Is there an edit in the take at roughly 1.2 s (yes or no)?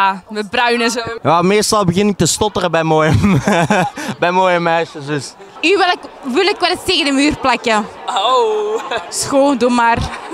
yes